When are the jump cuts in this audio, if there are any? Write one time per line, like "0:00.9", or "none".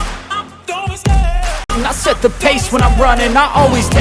0:01.7

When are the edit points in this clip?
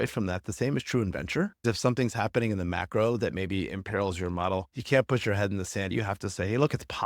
0:01.6
0:05.9

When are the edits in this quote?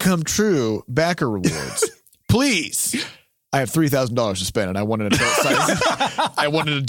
none

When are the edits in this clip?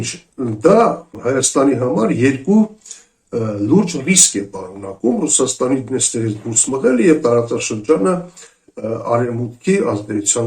0:01.1

